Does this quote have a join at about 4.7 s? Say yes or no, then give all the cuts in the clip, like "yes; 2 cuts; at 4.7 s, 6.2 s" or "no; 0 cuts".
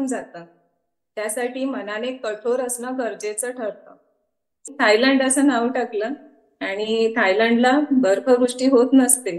yes; 1 cut; at 4.7 s